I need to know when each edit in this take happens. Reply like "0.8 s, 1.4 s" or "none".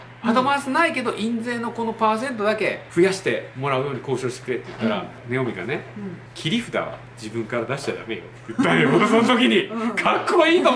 2.8 s, 5.2 s, 6.3 s